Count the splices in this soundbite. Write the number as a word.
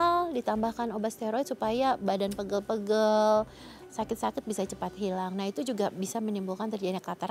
zero